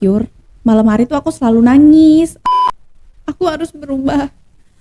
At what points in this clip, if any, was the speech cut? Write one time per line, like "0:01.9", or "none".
0:02.4